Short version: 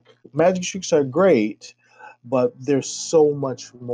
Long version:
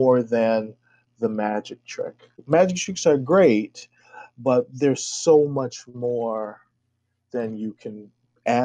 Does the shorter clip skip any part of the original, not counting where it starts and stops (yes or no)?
no